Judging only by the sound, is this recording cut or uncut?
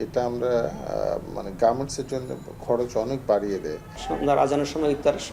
cut